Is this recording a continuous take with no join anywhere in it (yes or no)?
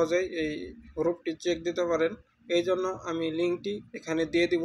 yes